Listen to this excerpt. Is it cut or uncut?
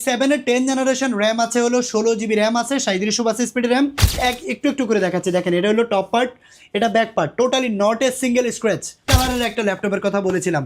cut